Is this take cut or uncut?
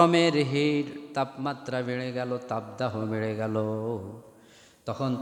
uncut